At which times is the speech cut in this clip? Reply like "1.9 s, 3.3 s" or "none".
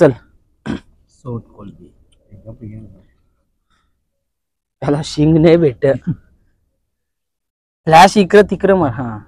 none